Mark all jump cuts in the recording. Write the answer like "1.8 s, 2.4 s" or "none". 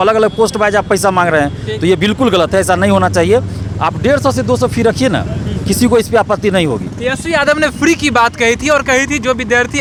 none